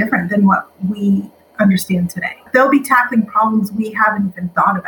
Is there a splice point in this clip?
yes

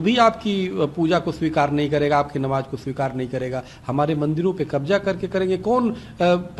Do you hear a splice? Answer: no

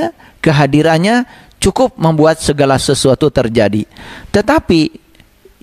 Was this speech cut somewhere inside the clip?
no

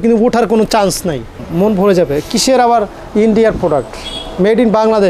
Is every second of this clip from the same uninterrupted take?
no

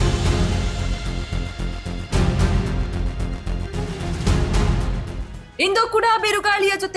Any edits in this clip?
yes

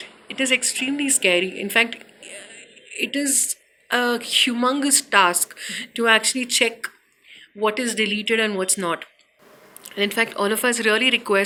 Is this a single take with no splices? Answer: yes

